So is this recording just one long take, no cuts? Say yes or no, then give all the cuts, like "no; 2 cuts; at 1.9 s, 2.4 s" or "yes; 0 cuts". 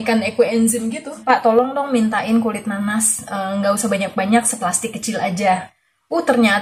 no; 1 cut; at 1.2 s